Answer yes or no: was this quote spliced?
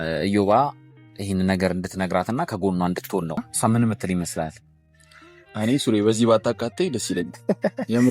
yes